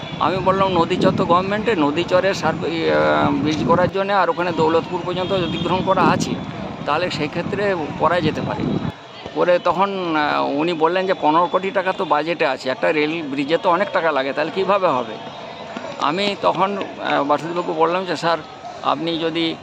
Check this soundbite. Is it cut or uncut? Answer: uncut